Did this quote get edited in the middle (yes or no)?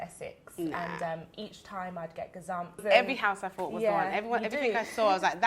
yes